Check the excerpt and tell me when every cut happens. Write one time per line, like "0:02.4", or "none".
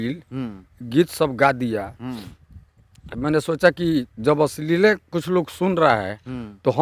none